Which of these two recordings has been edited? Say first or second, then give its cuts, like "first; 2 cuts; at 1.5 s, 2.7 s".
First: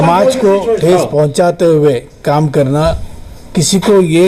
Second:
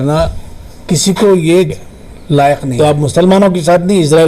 second; 1 cut; at 2.7 s